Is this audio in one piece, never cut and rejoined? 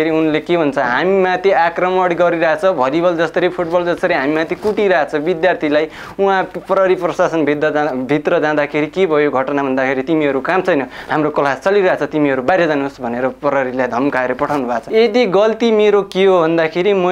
no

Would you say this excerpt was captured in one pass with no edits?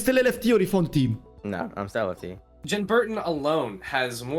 no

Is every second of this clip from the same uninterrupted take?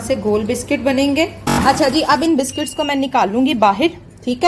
no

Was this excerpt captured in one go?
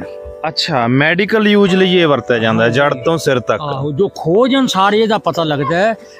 yes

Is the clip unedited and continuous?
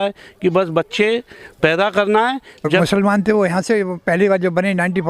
no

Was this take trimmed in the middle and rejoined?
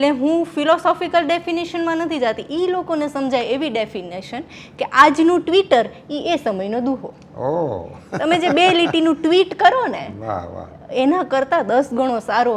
no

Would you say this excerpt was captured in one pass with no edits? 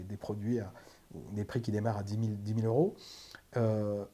yes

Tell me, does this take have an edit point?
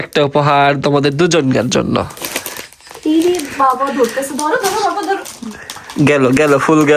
no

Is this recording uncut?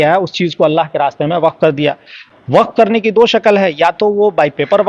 yes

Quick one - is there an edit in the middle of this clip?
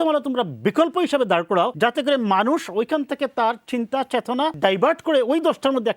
yes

